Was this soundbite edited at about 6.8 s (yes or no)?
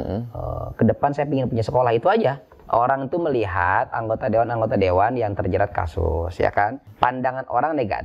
yes